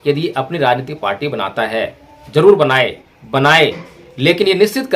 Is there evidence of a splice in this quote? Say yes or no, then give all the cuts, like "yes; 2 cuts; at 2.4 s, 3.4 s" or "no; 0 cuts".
yes; 1 cut; at 3.0 s